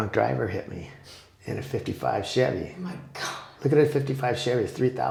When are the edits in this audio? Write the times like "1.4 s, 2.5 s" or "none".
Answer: none